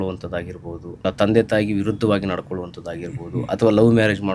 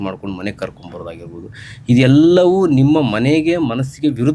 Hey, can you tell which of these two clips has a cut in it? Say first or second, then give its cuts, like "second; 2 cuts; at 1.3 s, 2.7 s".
first; 1 cut; at 1.0 s